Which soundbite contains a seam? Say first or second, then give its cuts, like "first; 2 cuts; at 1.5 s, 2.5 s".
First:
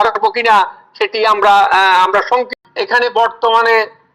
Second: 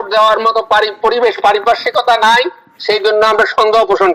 first; 1 cut; at 2.6 s